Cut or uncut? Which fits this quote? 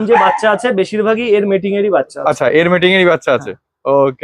uncut